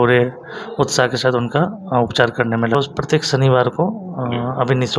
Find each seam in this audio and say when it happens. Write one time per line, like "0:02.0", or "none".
0:02.7